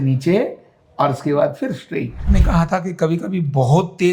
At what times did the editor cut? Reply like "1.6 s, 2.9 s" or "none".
2.2 s